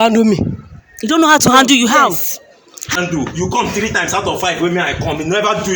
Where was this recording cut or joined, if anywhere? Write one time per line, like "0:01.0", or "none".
0:02.9